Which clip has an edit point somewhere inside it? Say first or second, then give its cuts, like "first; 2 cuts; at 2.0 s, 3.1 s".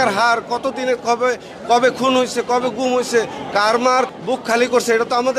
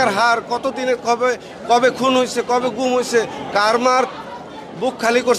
first; 1 cut; at 4.2 s